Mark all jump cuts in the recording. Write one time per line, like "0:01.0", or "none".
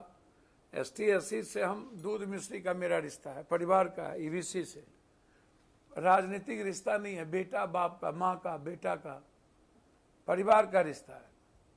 none